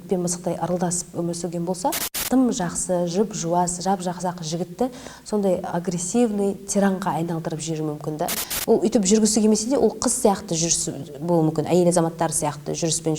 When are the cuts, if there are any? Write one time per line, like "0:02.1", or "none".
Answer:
0:02.1
0:08.4